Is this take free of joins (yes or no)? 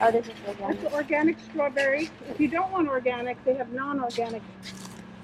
yes